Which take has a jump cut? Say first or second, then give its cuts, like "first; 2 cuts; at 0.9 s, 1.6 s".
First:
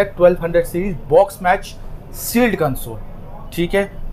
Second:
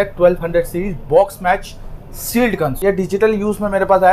second; 1 cut; at 2.8 s